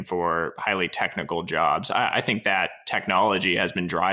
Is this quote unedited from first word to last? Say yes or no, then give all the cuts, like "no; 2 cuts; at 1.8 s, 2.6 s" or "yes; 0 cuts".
yes; 0 cuts